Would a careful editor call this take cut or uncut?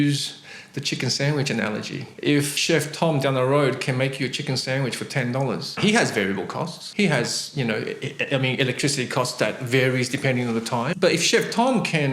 cut